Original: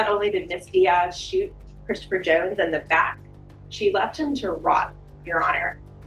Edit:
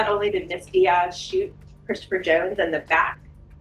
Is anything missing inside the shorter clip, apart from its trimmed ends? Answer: no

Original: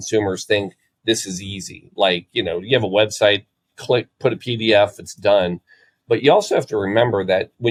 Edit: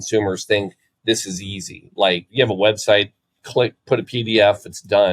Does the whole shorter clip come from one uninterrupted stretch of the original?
no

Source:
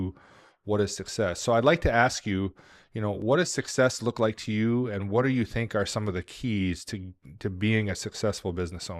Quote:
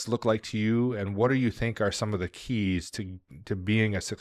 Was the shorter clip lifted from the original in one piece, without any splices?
yes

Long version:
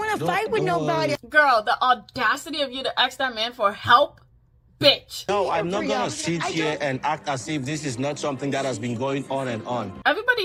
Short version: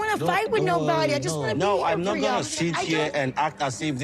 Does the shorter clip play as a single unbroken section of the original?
no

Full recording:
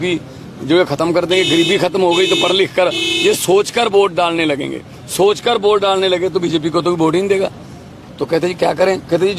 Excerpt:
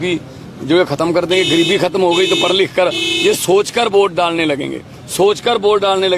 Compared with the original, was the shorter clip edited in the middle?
no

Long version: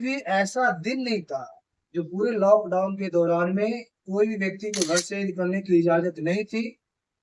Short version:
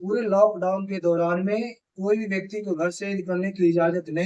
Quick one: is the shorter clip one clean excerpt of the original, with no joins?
yes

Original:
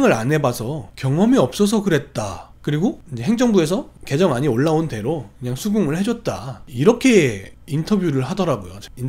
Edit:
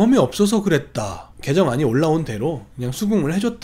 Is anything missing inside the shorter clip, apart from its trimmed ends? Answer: yes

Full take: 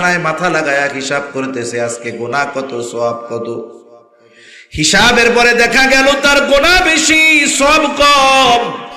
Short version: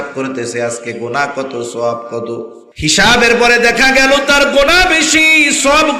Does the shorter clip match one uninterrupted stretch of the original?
no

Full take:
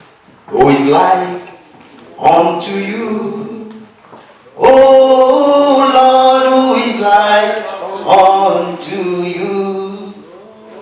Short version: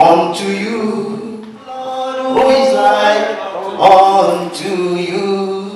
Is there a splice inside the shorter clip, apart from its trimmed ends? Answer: yes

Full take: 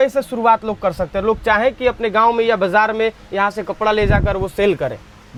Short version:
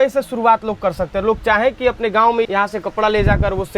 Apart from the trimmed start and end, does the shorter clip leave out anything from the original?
yes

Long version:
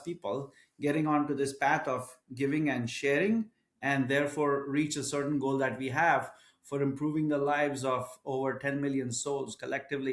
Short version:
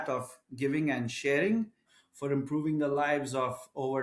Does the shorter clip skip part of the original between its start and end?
yes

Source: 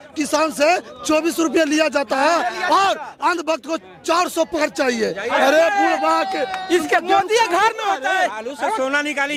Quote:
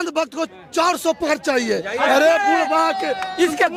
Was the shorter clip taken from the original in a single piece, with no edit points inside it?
yes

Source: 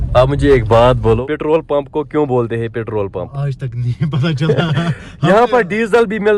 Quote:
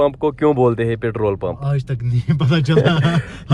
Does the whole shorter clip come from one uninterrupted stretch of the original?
yes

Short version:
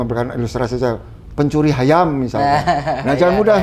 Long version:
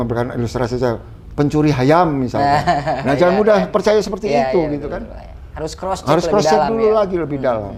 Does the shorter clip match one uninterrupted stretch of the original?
yes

